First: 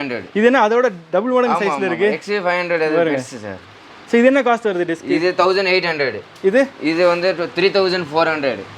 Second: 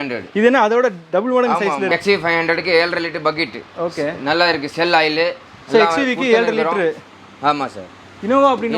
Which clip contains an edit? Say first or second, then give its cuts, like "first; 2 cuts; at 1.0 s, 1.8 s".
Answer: second; 1 cut; at 1.9 s